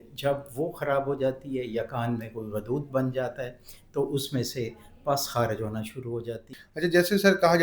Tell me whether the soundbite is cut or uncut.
cut